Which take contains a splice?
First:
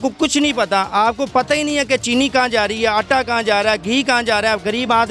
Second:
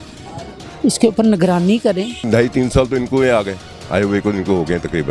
second; 1 cut; at 2.3 s

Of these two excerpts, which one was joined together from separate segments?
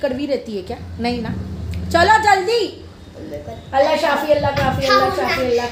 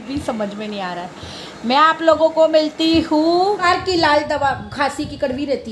second; 1 cut; at 3.6 s

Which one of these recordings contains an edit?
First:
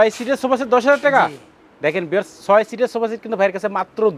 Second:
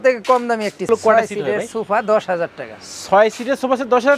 second; 1 cut; at 0.9 s

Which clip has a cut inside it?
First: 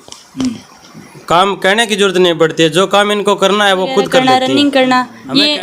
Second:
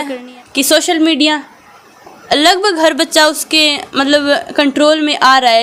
first; 1 cut; at 4.2 s

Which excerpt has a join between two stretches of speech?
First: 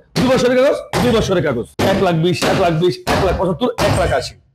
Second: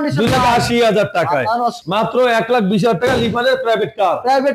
second; 1 cut; at 1.8 s

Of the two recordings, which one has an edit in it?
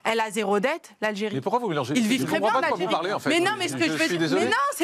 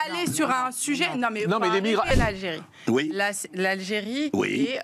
second; 1 cut; at 2.1 s

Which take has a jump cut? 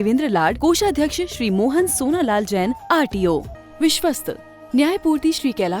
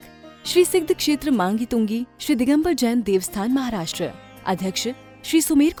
first; 1 cut; at 3.6 s

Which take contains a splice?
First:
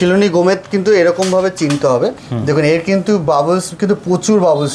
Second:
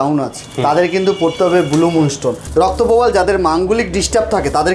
second; 1 cut; at 2.4 s

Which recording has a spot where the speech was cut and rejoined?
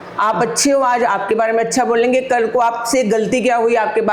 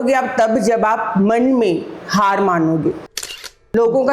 second; 1 cut; at 3.2 s

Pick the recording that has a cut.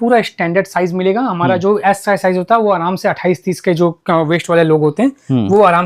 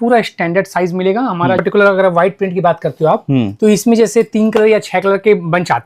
second; 1 cut; at 1.6 s

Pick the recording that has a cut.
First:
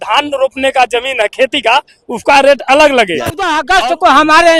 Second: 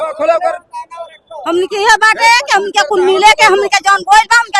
first; 1 cut; at 3.6 s

